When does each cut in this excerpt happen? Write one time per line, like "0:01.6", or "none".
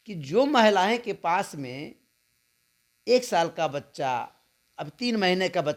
none